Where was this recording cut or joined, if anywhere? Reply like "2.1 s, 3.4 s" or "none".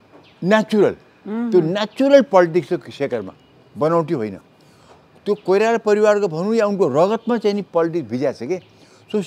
none